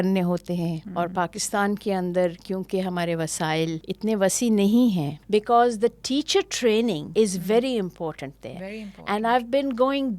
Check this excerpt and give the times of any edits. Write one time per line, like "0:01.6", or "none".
0:00.8
0:03.9
0:05.2
0:07.0